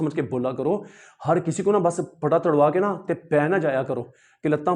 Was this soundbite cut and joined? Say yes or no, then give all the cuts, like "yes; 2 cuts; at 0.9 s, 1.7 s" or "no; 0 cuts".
no; 0 cuts